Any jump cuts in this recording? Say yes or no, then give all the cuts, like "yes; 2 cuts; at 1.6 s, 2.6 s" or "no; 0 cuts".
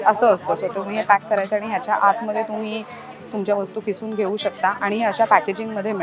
no; 0 cuts